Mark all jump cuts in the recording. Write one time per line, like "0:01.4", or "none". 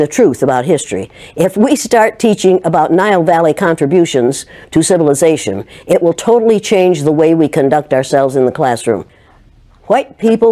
0:09.1